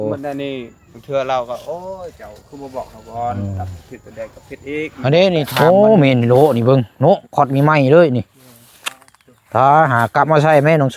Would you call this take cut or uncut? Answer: cut